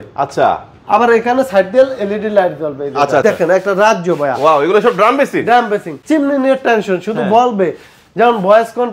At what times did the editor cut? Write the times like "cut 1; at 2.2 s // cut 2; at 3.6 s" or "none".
cut 1; at 3.2 s // cut 2; at 5.9 s